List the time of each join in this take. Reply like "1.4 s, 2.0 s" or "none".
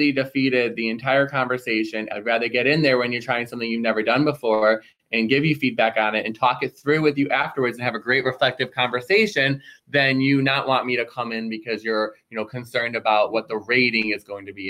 2.1 s